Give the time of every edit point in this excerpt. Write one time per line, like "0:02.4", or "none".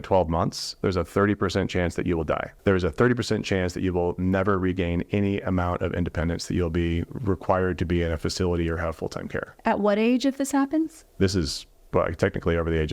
0:02.5

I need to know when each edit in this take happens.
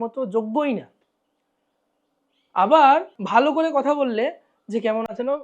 0:03.2

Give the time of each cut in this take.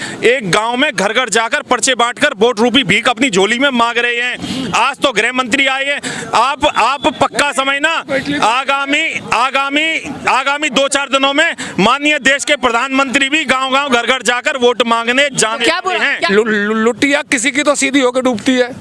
0:16.3

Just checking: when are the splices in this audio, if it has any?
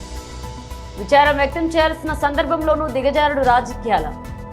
0:00.9

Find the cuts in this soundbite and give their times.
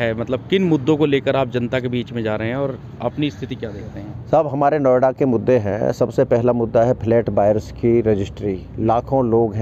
none

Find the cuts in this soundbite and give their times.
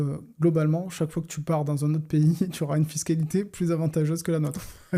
none

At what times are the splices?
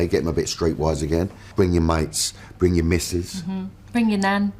0:01.5

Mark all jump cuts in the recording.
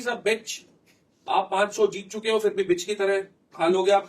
none

